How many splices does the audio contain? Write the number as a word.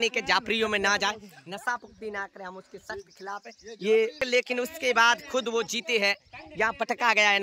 one